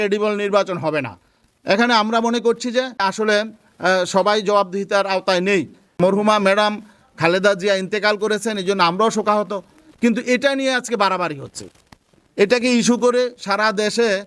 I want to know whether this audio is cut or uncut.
cut